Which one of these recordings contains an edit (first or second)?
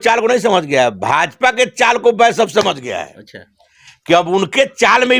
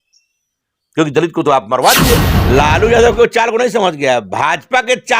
second